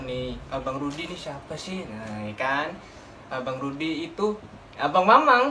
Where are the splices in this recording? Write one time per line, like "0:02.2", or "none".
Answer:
none